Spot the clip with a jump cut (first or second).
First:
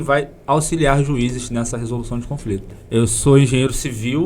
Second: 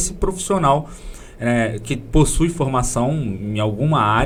first